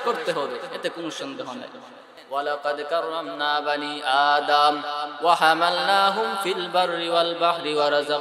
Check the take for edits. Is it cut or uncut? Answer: cut